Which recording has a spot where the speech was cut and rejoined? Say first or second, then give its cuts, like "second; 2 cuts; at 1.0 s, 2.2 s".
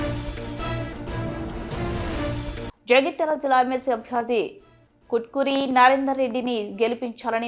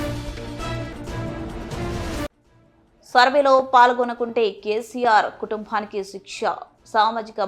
first; 1 cut; at 2.3 s